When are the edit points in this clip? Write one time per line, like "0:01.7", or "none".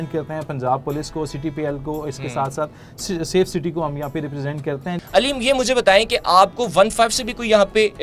0:05.0